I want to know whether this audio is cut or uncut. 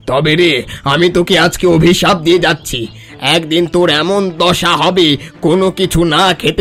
uncut